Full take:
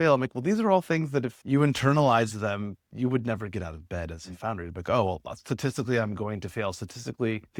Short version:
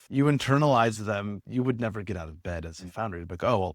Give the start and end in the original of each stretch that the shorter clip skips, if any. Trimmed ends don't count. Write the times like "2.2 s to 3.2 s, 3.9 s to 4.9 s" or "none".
2.8 s to 2.9 s